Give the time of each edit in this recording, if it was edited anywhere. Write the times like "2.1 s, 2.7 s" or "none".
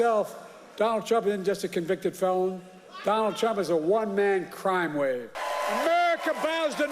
5.4 s